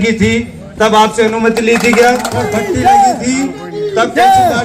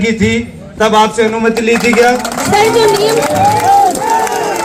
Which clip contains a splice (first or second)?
first